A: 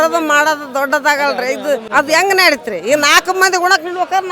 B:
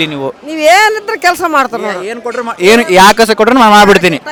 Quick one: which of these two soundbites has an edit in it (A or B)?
A